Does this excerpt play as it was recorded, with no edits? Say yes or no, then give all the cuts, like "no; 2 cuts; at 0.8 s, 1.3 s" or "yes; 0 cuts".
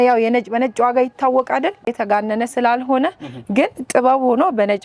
no; 1 cut; at 1.9 s